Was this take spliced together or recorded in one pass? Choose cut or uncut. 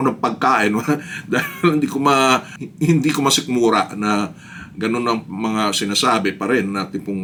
uncut